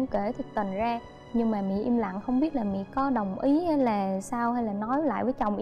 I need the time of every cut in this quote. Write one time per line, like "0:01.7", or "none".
0:01.2

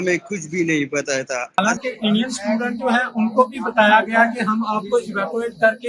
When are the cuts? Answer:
0:01.6

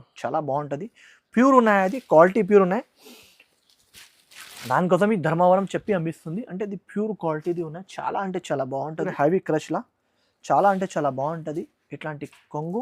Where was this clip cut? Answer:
0:09.1

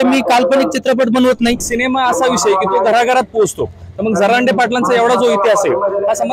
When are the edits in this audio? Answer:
0:01.6

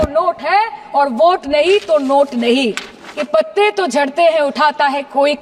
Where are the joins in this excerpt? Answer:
0:03.3

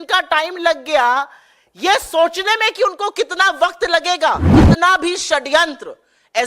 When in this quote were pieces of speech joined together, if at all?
0:04.4

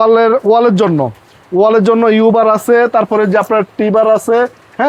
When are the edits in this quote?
none

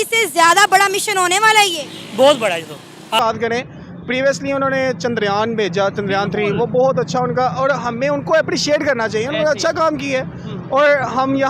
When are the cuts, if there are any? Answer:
0:03.1

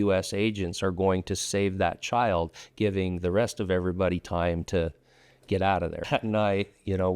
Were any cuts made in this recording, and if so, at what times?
0:06.0

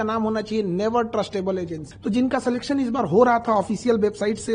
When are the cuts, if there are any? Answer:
0:01.9

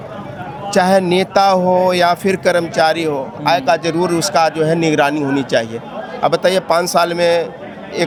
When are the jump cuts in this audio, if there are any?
none

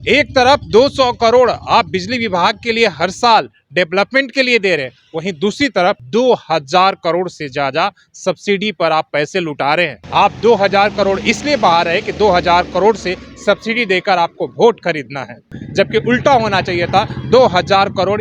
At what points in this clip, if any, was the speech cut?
0:06.0
0:10.0
0:15.6

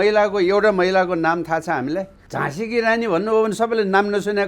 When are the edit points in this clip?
0:02.2

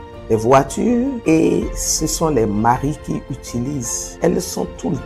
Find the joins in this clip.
0:01.2
0:04.0

